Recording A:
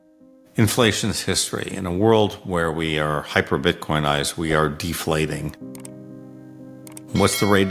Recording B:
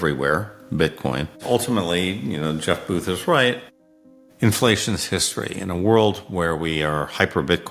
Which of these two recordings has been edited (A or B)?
B